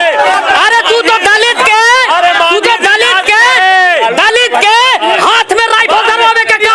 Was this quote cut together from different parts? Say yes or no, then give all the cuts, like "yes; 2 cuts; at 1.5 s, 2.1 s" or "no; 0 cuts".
no; 0 cuts